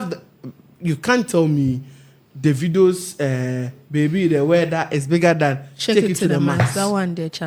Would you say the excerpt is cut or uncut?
uncut